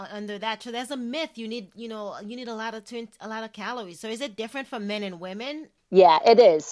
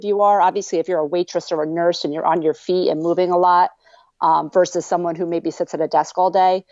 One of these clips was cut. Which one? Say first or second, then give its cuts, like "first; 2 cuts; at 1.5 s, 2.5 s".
first; 1 cut; at 5.7 s